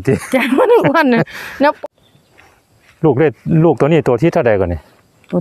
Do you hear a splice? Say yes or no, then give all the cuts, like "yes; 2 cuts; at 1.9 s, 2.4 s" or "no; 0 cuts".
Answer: yes; 1 cut; at 1.8 s